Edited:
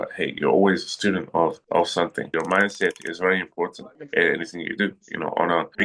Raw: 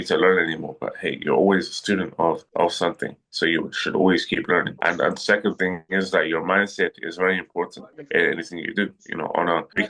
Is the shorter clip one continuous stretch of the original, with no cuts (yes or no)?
no